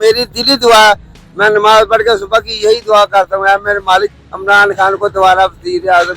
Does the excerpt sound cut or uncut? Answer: uncut